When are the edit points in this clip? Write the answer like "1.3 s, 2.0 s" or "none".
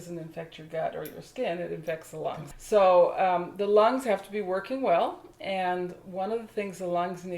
2.5 s